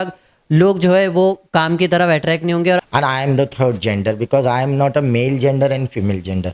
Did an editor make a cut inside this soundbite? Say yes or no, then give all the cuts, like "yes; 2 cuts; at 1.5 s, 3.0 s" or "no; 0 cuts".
yes; 1 cut; at 2.8 s